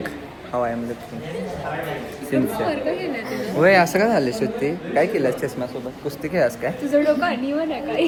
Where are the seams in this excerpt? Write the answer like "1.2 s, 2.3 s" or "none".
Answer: none